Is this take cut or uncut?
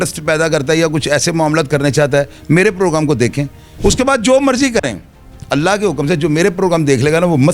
cut